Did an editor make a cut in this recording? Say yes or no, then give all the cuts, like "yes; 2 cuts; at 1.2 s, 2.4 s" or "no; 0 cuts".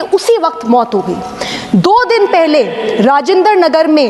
no; 0 cuts